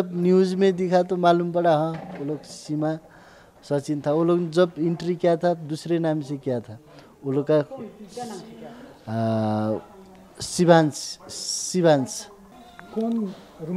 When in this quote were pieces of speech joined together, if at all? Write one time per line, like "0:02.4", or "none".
none